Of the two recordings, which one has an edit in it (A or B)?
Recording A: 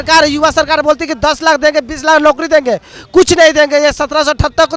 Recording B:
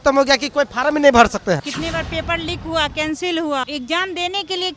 B